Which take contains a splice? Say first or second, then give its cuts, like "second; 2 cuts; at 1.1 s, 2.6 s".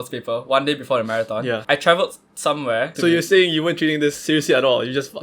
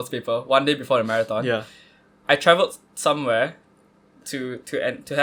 first; 2 cuts; at 1.6 s, 2.9 s